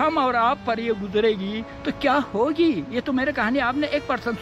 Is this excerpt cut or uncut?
uncut